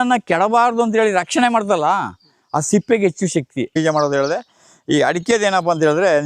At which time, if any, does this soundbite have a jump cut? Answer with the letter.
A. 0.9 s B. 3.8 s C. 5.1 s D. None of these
B